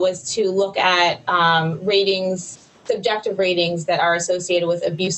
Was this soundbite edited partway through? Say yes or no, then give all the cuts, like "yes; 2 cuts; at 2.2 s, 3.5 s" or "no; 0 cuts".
no; 0 cuts